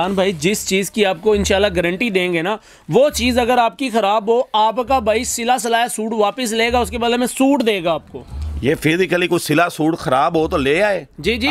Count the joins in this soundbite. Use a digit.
0